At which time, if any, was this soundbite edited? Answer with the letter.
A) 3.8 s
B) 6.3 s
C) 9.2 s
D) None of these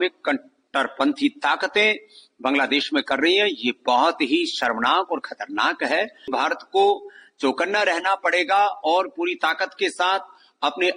B